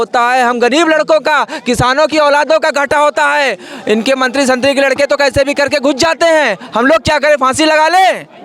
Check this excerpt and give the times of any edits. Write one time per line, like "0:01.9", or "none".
none